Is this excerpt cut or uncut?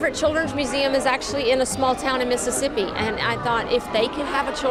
uncut